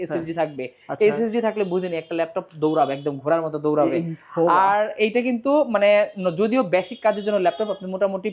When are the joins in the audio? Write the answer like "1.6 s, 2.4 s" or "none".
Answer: none